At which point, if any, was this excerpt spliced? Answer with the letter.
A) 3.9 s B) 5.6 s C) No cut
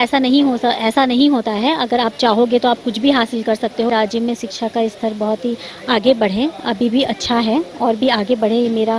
A